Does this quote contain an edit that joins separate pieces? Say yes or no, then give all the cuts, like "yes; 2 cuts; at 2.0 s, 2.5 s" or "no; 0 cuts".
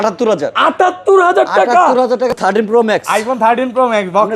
yes; 1 cut; at 2.3 s